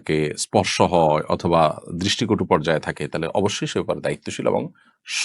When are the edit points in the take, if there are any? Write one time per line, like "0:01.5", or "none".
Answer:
none